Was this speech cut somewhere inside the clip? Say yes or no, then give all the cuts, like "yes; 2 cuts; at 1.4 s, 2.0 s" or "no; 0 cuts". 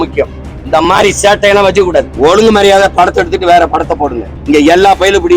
yes; 2 cuts; at 2.1 s, 4.3 s